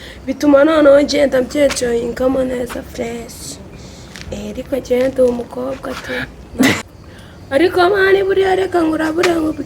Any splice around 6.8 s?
yes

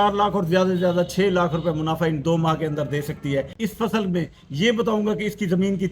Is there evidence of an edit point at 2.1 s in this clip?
no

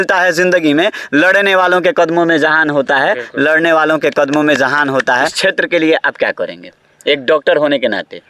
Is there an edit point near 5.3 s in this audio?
yes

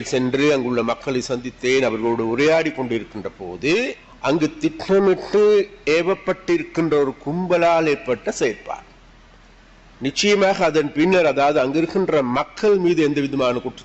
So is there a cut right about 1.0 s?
no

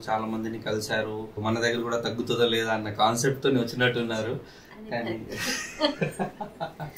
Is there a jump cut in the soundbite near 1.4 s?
yes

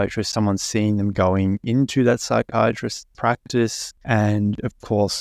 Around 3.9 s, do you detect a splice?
yes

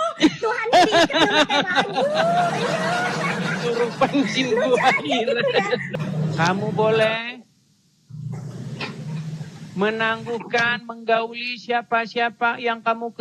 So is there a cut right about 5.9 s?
yes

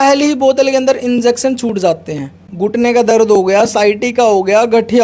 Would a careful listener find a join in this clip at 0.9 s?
no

